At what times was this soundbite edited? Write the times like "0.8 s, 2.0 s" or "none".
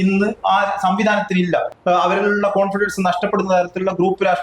1.7 s

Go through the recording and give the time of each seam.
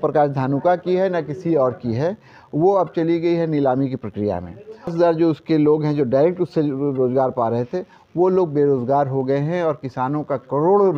4.9 s

